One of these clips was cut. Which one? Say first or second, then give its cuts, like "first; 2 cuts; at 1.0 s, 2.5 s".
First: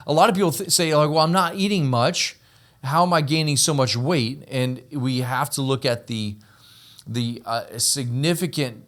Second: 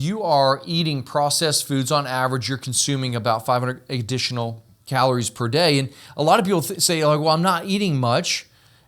second; 1 cut; at 4.7 s